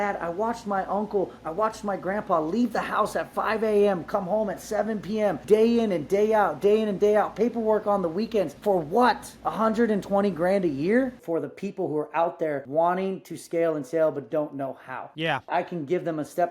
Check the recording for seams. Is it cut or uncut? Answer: cut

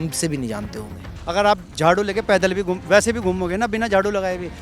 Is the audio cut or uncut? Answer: cut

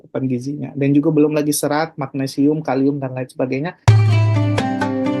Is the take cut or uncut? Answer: cut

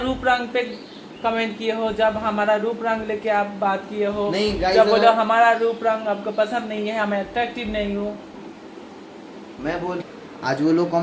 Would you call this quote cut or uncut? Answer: cut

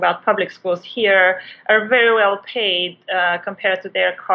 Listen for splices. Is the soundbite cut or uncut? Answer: uncut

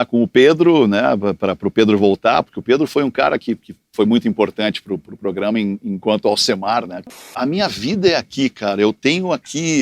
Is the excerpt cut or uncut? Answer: cut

